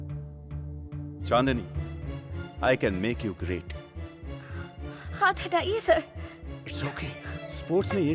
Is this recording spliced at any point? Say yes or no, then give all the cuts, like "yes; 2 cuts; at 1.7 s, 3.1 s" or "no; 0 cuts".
no; 0 cuts